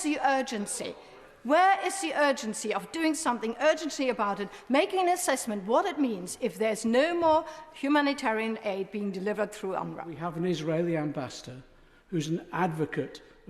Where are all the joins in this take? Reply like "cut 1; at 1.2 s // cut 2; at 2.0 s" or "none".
cut 1; at 10.2 s